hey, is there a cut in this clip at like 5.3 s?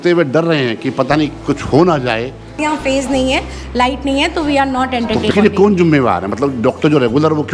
yes; 2 cuts; at 2.6 s, 5.3 s

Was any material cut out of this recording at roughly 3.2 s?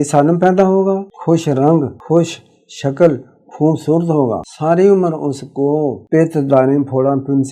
no; 4 cuts; at 1.1 s, 2.0 s, 4.5 s, 6.0 s

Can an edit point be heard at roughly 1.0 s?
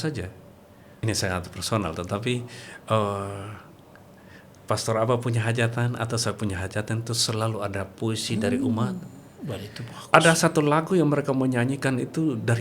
yes; 1 cut; at 1.0 s

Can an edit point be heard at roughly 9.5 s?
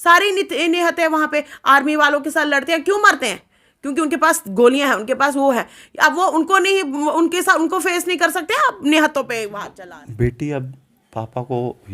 yes; 1 cut; at 9.5 s

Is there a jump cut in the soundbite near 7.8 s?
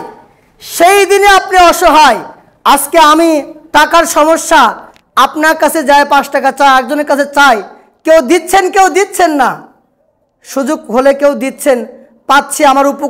no; 0 cuts

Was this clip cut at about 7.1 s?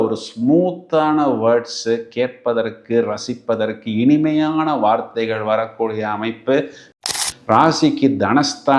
yes; 1 cut; at 7.1 s

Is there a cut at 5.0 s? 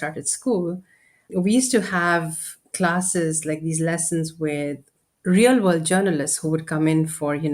yes; 1 cut; at 5.0 s

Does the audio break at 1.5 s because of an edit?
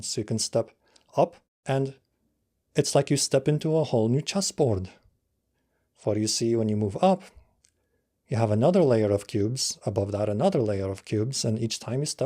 yes; 1 cut; at 1.5 s

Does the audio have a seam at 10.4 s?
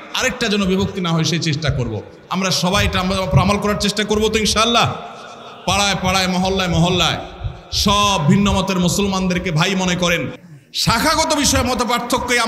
yes; 1 cut; at 10.4 s

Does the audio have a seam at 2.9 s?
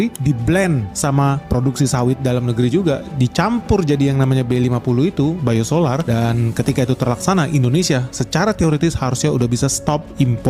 no; 0 cuts

